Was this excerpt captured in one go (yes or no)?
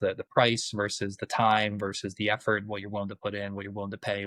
yes